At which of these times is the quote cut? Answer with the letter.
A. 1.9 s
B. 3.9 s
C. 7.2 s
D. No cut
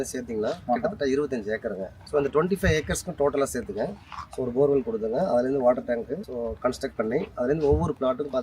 A